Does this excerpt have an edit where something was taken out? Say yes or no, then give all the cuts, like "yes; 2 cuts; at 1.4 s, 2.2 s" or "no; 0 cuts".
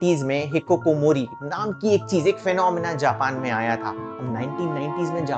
no; 0 cuts